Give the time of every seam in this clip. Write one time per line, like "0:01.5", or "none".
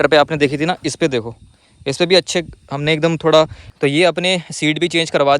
0:03.6

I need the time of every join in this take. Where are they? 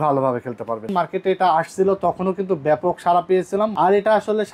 0:00.9
0:03.7

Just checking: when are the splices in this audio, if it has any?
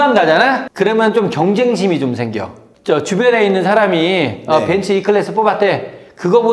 0:02.8

